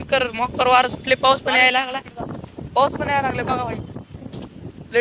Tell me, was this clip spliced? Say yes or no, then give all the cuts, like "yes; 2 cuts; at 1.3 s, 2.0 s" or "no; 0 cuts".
no; 0 cuts